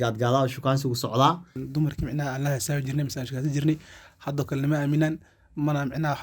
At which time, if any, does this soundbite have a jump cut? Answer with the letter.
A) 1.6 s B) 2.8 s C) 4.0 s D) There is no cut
A